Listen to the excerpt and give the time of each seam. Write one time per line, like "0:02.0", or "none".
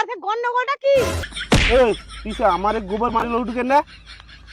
0:01.2

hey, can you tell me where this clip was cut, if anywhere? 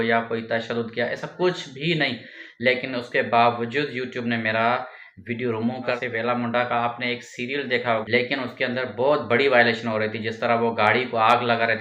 0:06.0
0:08.0

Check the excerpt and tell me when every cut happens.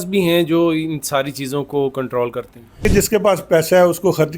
0:02.8

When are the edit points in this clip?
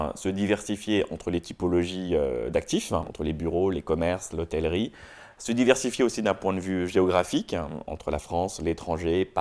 0:03.0

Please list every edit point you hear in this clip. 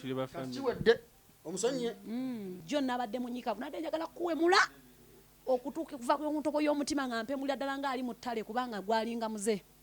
0:02.6

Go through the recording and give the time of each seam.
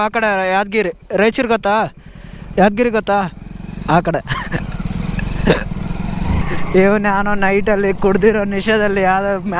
0:06.4

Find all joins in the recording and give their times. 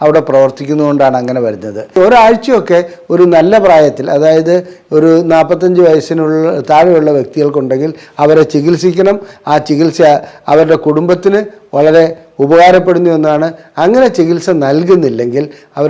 0:01.9

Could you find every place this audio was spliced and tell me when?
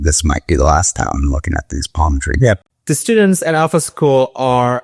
0:02.7

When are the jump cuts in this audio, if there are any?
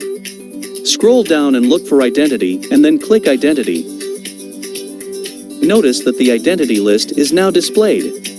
none

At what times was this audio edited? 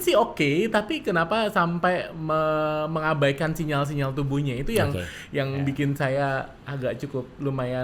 none

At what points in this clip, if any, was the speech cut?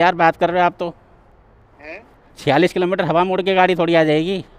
none

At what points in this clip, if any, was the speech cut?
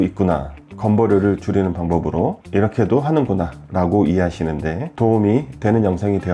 none

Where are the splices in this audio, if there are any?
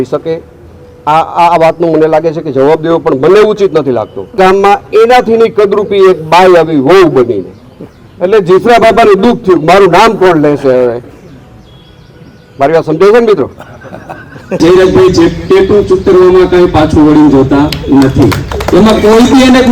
0:04.4
0:14.6

